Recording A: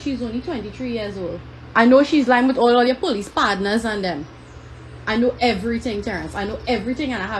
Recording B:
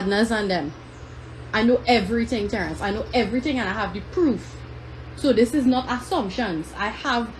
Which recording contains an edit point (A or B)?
A